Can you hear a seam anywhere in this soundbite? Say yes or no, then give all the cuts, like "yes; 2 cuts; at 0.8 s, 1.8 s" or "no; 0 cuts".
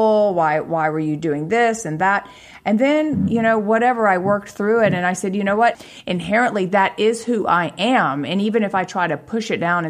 yes; 1 cut; at 5.8 s